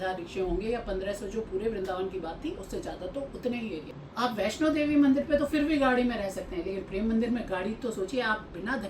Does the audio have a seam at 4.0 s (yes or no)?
yes